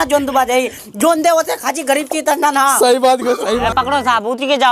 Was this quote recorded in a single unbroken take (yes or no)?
no